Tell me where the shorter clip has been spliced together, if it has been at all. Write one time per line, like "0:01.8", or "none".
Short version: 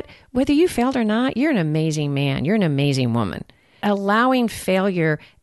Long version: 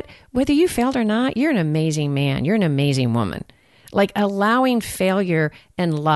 0:03.8